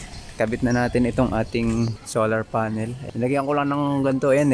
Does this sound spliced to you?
yes; 2 cuts; at 2.0 s, 3.0 s

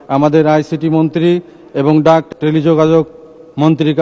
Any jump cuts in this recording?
yes; 1 cut; at 2.3 s

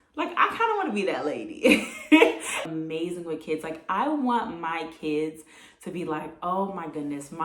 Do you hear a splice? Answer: yes; 1 cut; at 2.6 s

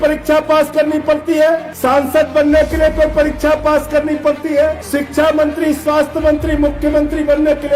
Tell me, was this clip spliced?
yes; 2 cuts; at 1.7 s, 4.8 s

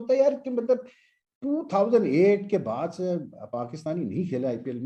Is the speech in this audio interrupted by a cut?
no; 0 cuts

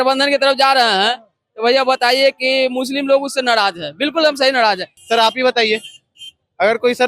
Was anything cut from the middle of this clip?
yes; 1 cut; at 4.9 s

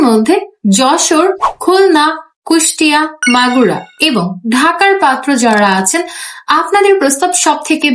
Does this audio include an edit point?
no; 0 cuts

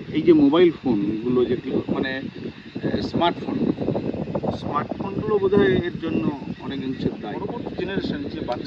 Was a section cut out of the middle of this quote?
yes; 1 cut; at 7.4 s

